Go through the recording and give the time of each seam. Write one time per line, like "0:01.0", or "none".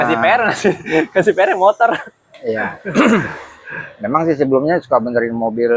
none